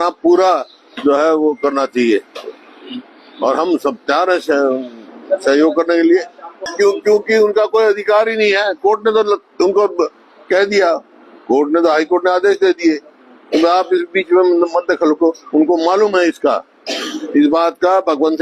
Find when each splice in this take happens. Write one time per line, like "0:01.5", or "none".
0:06.6